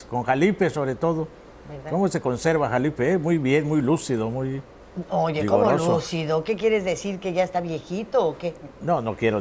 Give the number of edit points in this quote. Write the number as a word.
zero